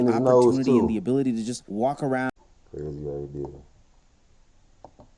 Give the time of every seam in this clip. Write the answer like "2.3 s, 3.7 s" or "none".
2.3 s